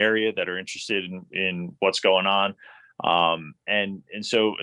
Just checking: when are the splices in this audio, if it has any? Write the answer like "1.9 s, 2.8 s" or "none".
none